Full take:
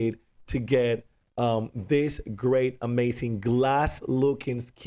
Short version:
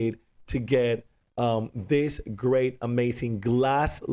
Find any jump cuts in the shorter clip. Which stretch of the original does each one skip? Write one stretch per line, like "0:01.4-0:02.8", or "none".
none